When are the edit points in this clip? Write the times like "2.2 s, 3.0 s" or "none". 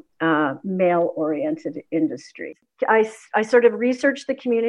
2.5 s